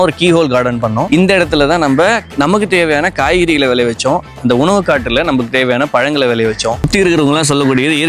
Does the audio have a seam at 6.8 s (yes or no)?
yes